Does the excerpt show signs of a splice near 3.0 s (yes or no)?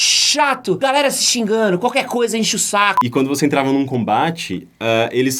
yes